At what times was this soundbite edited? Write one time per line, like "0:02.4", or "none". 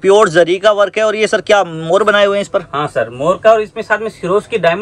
none